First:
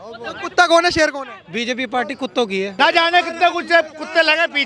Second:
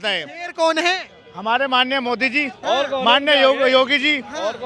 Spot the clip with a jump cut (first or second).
first